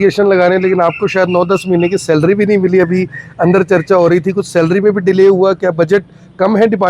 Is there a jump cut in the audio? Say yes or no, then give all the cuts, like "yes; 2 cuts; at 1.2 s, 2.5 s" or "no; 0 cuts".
no; 0 cuts